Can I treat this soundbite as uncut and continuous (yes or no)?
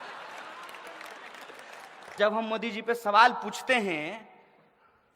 no